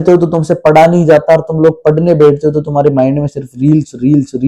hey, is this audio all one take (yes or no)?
yes